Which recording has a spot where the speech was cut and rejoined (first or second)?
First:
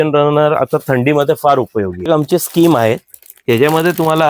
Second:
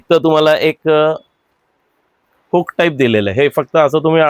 first